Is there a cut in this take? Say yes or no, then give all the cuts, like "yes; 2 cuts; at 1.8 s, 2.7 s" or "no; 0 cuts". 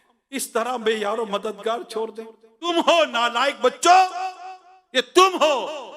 yes; 1 cut; at 2.7 s